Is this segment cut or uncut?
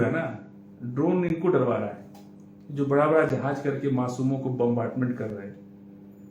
uncut